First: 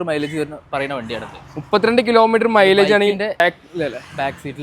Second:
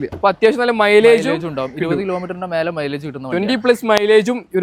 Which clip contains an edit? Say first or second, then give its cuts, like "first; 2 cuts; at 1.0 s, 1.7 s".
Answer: first; 1 cut; at 3.4 s